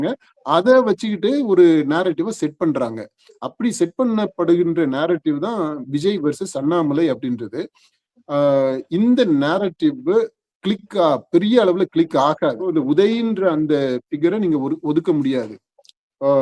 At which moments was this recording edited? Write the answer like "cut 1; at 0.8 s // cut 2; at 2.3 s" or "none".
cut 1; at 12.7 s